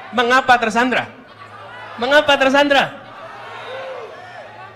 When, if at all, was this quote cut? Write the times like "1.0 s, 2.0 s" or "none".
none